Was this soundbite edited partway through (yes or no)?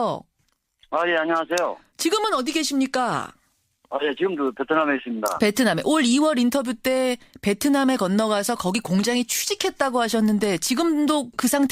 yes